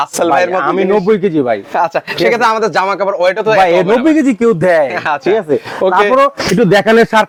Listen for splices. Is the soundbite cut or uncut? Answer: uncut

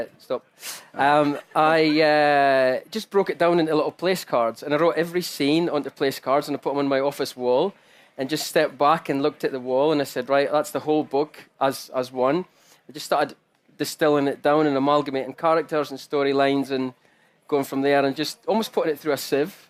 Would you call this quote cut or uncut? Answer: uncut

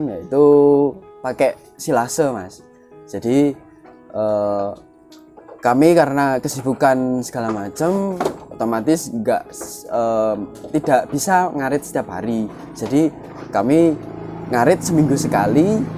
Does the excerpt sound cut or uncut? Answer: cut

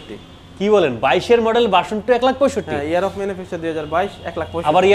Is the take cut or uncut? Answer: uncut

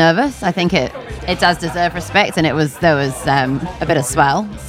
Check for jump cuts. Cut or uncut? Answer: cut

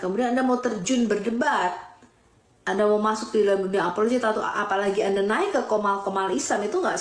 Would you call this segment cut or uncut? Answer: uncut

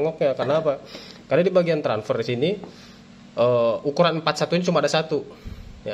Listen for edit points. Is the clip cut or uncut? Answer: uncut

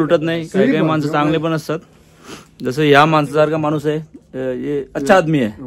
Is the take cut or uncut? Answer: uncut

